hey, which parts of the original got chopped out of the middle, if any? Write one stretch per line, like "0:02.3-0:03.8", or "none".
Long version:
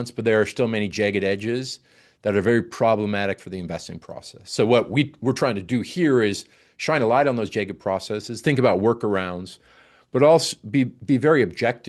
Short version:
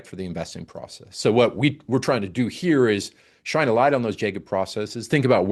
none